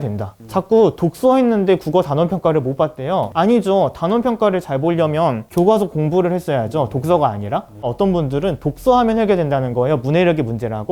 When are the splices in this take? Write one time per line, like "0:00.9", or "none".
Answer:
0:07.9